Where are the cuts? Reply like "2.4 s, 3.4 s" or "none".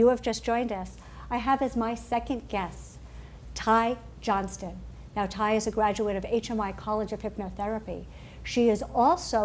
5.5 s